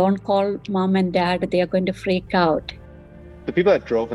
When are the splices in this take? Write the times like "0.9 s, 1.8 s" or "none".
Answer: 2.9 s